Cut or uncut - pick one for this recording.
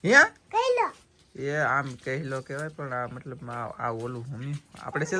uncut